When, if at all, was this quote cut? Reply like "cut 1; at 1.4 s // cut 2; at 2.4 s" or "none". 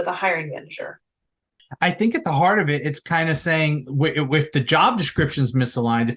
cut 1; at 1.6 s

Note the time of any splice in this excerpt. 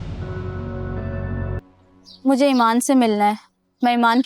cut 1; at 1.6 s

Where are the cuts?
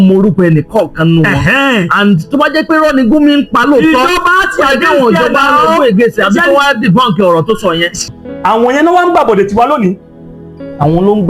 cut 1; at 8.1 s

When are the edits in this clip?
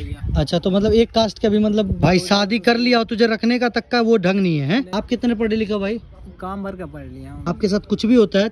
cut 1; at 1.9 s // cut 2; at 4.9 s // cut 3; at 7.3 s

